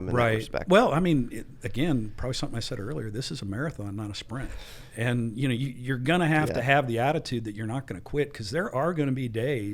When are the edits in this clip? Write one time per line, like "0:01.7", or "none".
none